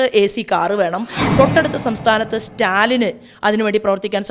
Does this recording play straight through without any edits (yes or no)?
no